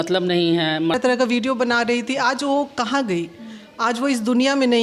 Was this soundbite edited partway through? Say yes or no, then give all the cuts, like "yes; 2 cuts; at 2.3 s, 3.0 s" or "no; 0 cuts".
yes; 1 cut; at 1.0 s